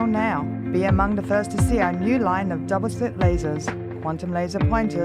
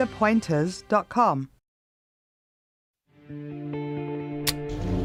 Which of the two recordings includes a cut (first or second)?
first